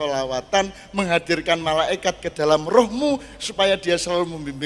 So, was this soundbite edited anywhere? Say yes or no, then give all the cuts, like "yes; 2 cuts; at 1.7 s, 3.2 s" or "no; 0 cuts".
no; 0 cuts